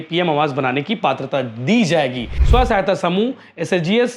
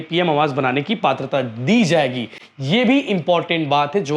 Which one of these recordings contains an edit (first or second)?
first